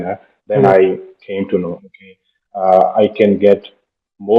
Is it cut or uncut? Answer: uncut